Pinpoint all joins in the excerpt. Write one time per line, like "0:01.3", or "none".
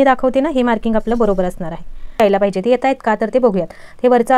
0:02.2